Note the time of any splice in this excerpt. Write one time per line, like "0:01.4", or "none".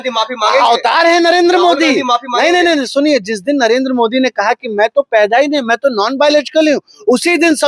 none